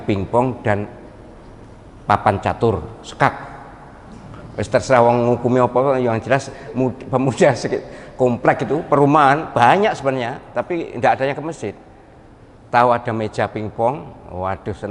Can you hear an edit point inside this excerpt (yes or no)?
no